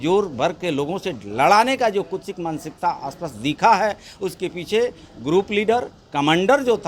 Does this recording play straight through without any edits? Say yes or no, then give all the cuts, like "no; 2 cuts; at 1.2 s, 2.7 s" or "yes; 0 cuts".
yes; 0 cuts